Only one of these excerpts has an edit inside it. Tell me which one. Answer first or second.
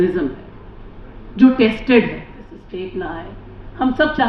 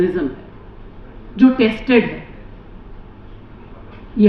first